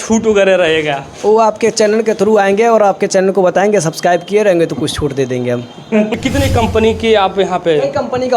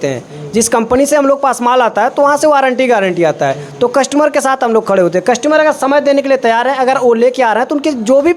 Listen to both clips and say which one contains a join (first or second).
first